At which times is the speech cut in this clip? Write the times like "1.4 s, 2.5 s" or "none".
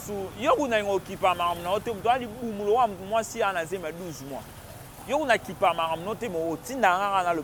none